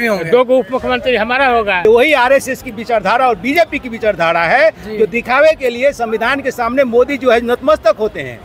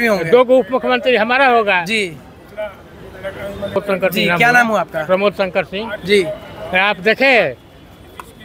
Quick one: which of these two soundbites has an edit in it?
first; 1 cut; at 1.8 s

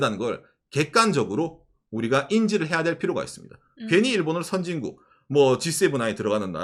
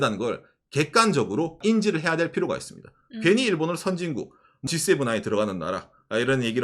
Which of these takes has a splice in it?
second; 2 cuts; at 1.6 s, 4.7 s

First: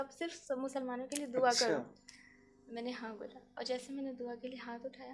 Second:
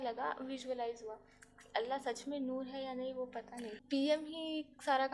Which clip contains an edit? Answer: second; 1 cut; at 3.8 s

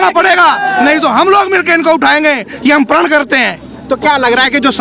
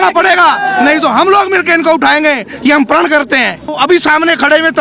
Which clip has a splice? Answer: second; 1 cut; at 3.7 s

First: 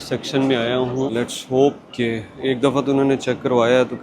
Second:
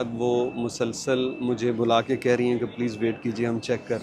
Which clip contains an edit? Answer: first; 1 cut; at 1.1 s

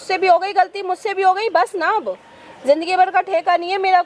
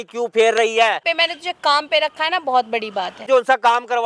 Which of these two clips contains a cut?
second; 2 cuts; at 1.0 s, 3.3 s

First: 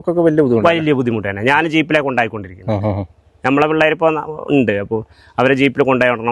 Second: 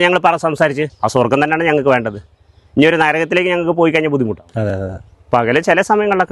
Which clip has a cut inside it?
second; 2 cuts; at 0.9 s, 5.1 s

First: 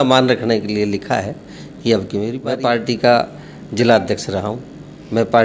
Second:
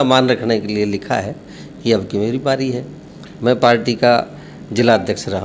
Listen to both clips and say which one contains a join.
first; 1 cut; at 2.4 s

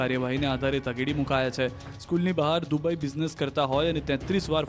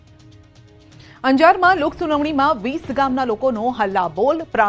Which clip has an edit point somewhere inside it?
first; 1 cut; at 3.1 s

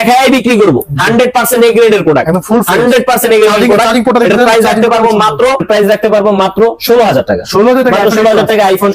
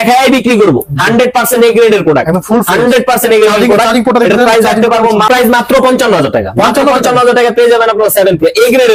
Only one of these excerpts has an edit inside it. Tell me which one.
first; 1 cut; at 5.3 s

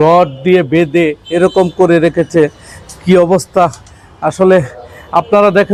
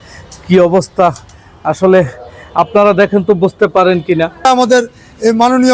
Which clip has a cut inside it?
second; 1 cut; at 4.4 s

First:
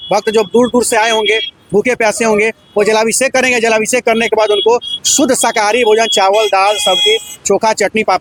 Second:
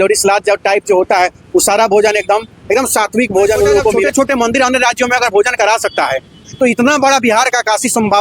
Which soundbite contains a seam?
second; 1 cut; at 4.0 s

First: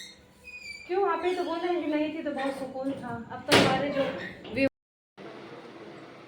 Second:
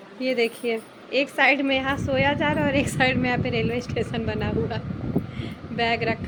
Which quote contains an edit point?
first; 1 cut; at 4.7 s

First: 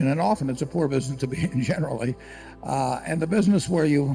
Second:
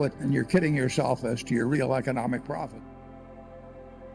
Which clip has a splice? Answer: second; 1 cut; at 3.2 s

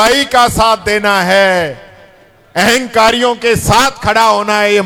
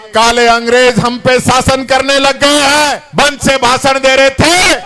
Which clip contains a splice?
second; 1 cut; at 3.0 s

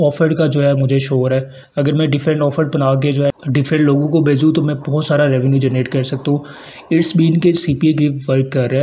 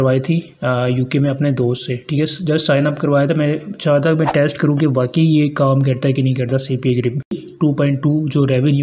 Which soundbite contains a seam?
second; 1 cut; at 7.5 s

